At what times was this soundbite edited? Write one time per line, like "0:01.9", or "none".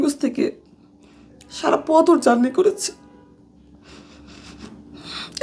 none